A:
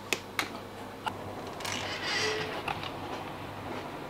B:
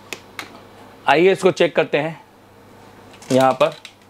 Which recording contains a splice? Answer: A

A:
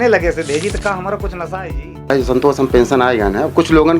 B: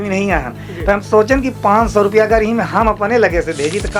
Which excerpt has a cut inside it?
A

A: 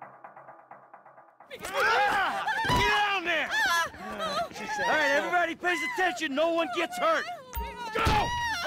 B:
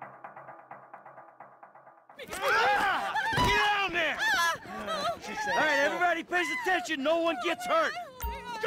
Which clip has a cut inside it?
A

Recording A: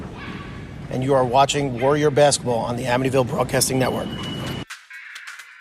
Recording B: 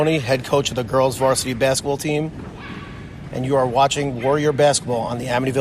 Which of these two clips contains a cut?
A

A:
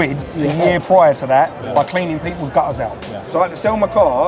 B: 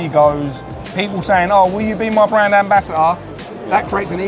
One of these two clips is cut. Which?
A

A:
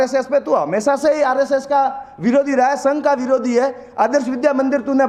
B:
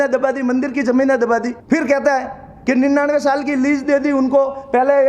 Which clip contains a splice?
B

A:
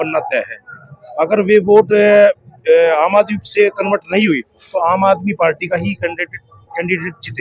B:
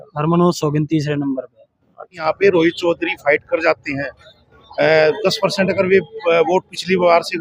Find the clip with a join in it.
B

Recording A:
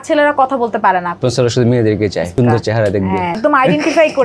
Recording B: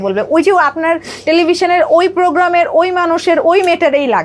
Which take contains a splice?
A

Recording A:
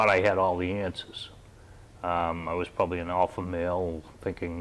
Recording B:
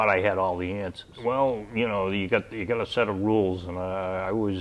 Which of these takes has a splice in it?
B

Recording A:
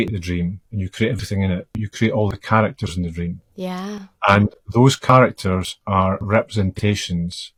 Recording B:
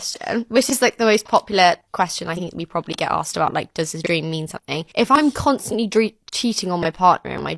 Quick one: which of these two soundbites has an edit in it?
B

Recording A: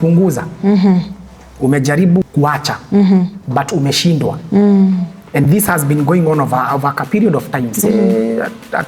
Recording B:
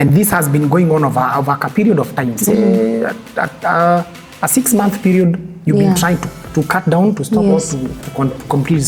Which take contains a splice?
A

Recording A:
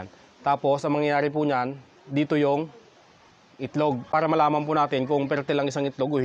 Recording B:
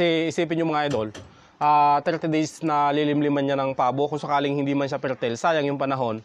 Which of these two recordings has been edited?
A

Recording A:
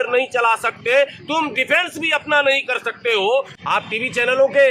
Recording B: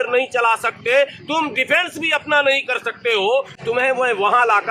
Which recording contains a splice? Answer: A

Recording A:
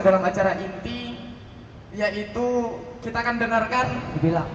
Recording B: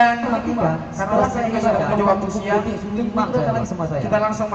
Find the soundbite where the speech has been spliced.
A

